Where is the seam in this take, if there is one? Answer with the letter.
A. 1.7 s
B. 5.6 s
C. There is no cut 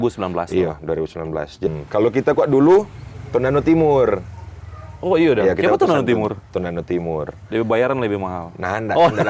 A